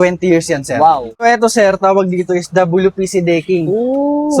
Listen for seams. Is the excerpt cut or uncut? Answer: cut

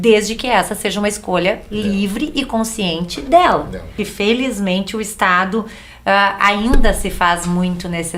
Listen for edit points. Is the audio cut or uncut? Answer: cut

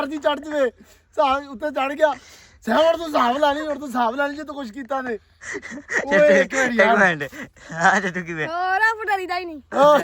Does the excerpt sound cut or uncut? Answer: uncut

